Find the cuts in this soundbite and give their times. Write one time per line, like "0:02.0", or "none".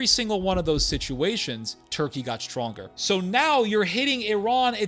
0:02.9